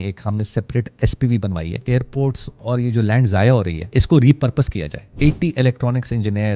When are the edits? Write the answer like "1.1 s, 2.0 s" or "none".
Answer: 1.8 s, 3.8 s, 5.1 s